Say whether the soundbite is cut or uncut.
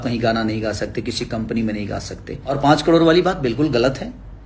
cut